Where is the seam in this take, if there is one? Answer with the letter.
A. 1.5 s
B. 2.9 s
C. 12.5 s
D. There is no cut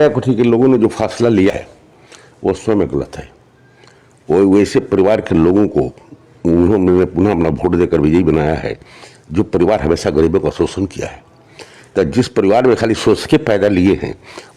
A